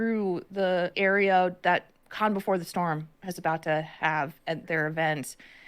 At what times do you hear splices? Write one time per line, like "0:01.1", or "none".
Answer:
0:00.9
0:04.6